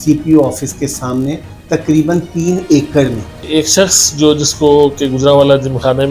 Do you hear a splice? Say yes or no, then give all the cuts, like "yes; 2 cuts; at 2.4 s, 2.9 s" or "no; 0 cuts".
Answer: yes; 1 cut; at 3.4 s